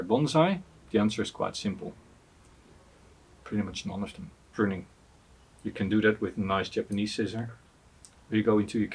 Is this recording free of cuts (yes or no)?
no